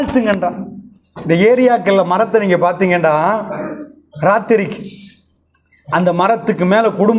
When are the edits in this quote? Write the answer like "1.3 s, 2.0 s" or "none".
none